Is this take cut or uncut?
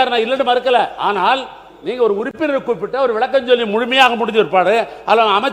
uncut